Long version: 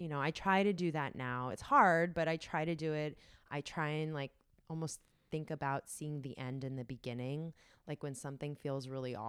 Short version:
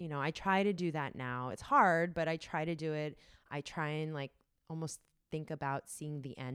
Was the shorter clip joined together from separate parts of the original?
no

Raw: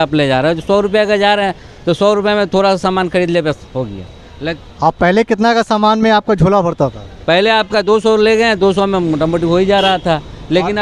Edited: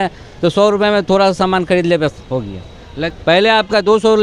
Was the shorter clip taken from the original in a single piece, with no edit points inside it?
no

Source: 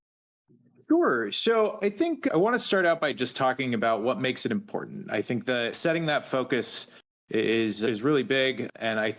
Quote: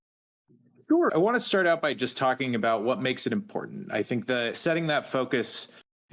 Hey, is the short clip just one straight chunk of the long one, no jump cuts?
no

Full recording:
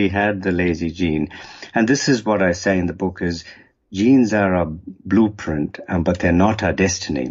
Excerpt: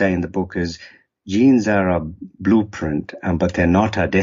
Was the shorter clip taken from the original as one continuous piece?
yes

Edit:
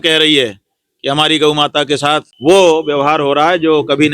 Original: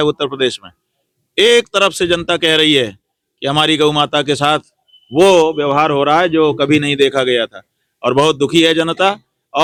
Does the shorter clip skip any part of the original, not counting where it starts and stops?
yes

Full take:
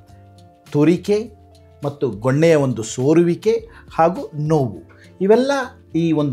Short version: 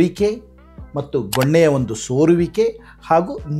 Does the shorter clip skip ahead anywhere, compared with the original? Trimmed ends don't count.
no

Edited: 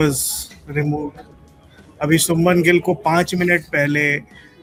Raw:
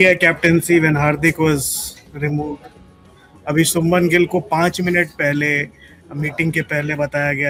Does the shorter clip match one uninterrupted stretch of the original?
yes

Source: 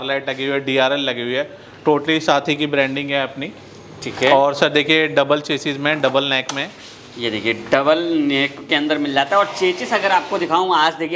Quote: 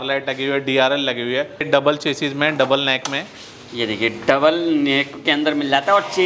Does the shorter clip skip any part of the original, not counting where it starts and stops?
yes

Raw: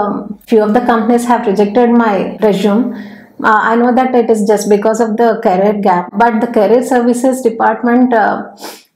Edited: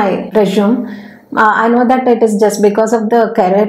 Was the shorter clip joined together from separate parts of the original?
no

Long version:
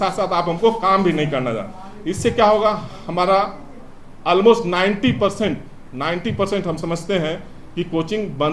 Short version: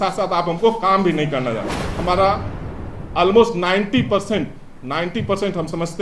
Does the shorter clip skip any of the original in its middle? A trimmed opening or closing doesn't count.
yes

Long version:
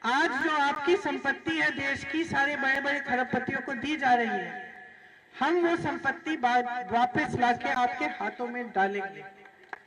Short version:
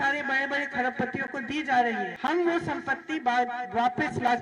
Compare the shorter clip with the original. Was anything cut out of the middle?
yes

